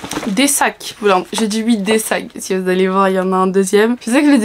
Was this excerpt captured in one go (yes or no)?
yes